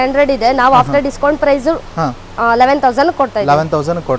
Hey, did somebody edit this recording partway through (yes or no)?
no